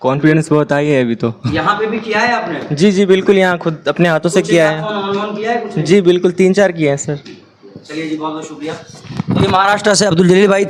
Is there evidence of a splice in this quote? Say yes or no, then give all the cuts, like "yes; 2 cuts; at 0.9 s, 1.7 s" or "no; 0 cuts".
no; 0 cuts